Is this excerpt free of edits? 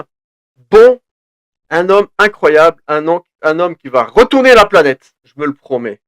no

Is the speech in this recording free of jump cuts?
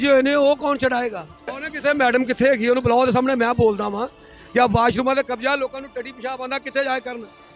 no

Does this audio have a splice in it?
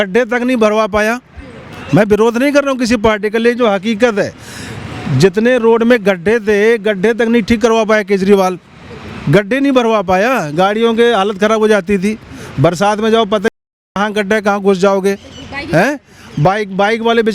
no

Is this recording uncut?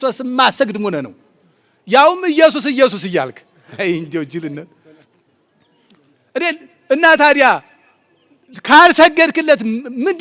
yes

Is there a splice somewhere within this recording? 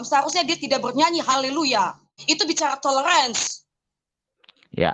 yes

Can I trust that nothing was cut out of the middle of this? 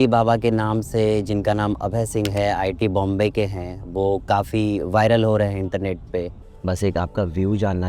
yes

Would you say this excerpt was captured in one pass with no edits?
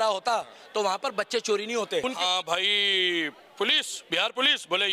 no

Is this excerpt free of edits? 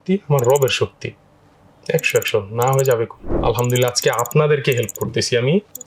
no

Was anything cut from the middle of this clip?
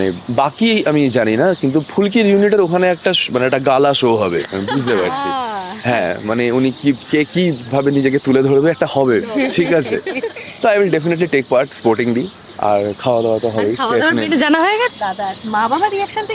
yes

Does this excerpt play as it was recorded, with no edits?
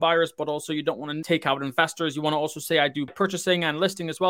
no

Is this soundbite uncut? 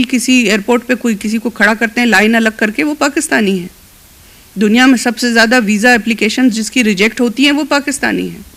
yes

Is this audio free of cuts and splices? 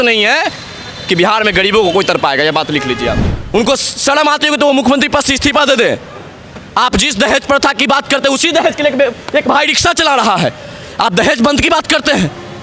no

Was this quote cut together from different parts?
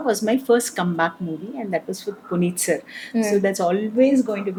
no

